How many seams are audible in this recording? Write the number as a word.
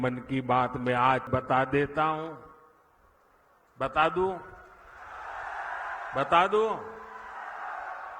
one